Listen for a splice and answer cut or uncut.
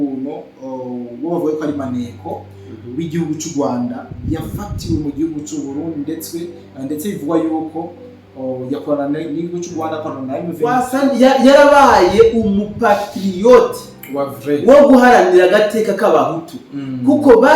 cut